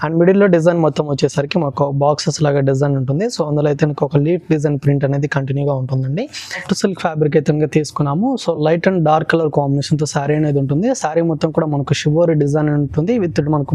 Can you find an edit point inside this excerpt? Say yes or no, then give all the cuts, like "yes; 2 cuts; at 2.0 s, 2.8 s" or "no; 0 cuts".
yes; 1 cut; at 6.6 s